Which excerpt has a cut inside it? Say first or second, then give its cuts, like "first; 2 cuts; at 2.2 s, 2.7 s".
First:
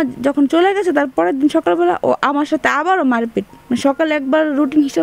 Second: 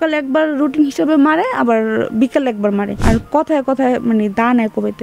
second; 1 cut; at 3.0 s